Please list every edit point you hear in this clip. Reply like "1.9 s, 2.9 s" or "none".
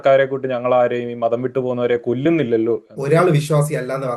2.9 s